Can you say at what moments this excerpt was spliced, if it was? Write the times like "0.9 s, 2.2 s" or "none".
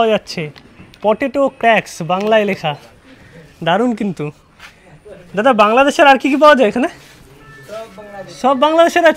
none